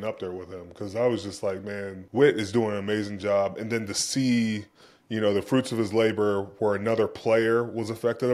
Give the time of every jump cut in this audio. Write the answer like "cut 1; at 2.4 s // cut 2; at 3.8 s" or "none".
cut 1; at 2.0 s

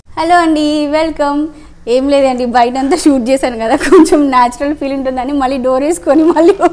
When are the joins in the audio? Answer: none

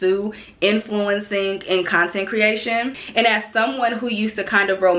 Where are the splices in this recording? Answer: cut 1; at 3.0 s

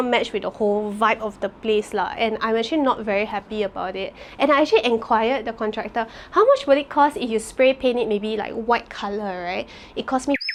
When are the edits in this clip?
none

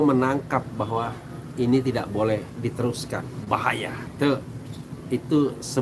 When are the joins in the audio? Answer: none

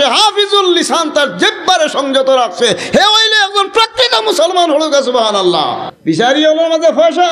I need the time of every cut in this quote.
cut 1; at 5.9 s

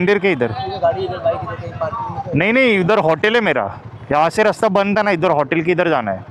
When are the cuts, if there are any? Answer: none

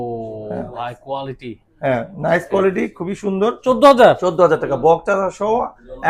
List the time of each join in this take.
cut 1; at 3.6 s

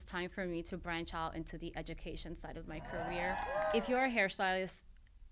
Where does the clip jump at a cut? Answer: cut 1; at 3.5 s

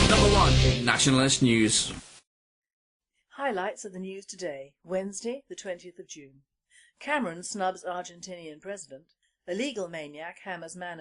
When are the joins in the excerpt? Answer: cut 1; at 7.9 s

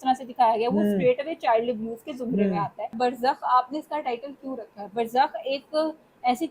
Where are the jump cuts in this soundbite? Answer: cut 1; at 2.9 s

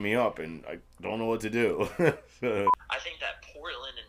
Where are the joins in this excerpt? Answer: cut 1; at 2.8 s

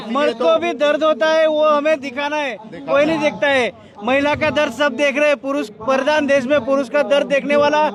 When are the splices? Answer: none

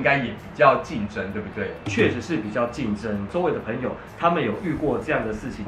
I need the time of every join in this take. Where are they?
cut 1; at 3.3 s

